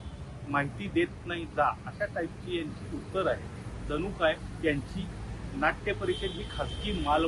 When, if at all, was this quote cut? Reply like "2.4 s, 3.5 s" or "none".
none